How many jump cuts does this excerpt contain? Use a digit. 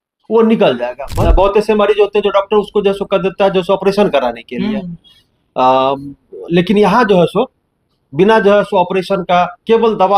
1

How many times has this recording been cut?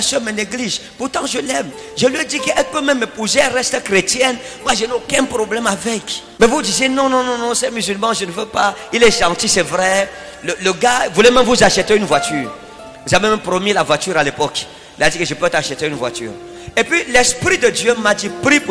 1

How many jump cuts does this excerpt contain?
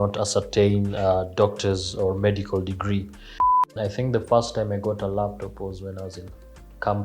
1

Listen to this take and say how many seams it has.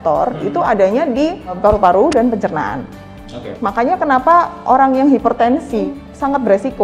3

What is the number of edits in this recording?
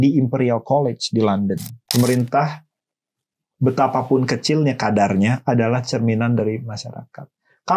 1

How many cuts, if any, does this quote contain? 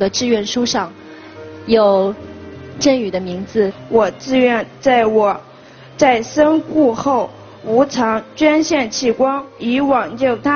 1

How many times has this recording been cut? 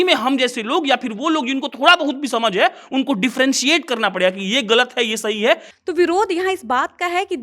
1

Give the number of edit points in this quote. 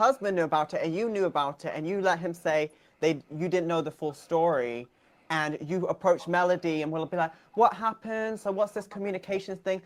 0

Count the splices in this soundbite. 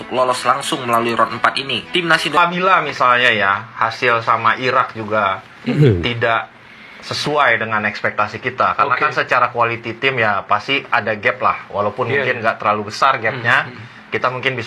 1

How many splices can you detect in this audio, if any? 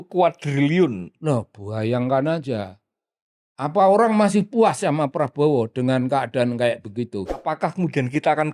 1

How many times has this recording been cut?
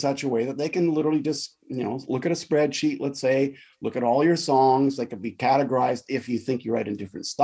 0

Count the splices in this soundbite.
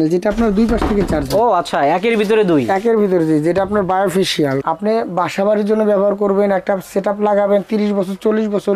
1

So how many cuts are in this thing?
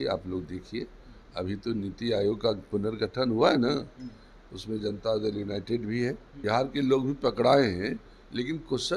1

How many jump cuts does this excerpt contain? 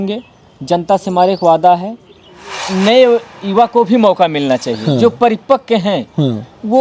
1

